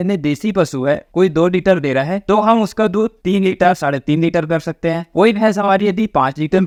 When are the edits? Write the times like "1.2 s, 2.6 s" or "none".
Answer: none